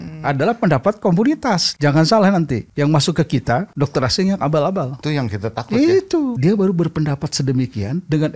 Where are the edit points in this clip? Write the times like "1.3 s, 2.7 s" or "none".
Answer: 1.7 s, 2.6 s, 3.7 s, 5.0 s, 6.4 s